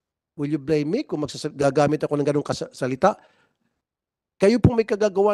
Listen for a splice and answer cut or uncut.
uncut